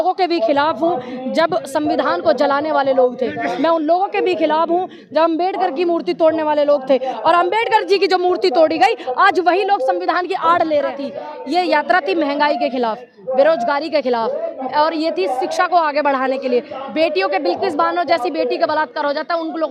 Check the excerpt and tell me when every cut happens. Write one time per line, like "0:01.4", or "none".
0:11.1